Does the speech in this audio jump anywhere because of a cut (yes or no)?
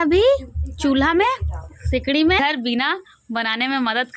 yes